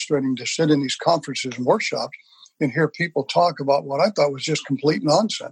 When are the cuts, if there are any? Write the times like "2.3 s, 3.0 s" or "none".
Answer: none